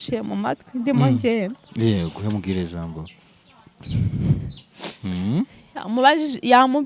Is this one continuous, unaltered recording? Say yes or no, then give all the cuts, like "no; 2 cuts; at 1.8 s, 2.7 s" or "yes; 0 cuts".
yes; 0 cuts